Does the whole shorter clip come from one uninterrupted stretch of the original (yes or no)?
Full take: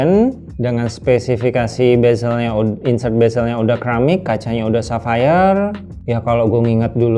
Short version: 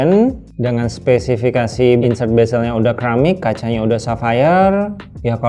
no